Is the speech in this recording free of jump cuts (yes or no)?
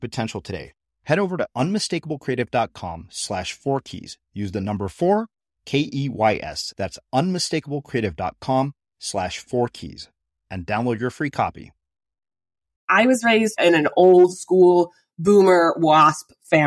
no